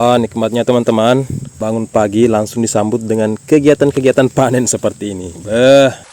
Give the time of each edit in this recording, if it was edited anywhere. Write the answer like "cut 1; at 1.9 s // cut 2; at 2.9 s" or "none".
cut 1; at 1.4 s